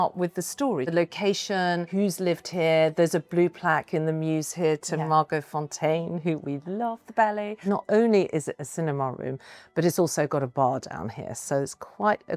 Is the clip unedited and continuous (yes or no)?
no